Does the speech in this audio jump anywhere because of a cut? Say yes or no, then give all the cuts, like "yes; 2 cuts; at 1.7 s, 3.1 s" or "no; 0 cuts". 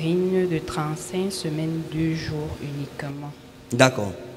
no; 0 cuts